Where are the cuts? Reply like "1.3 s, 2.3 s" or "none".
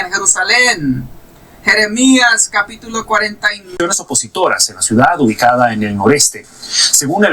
3.7 s